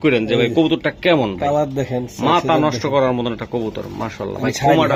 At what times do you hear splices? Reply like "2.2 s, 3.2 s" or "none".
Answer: none